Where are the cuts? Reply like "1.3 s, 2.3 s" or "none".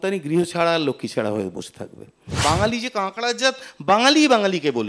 2.3 s